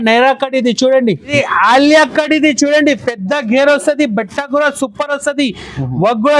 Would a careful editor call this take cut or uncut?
cut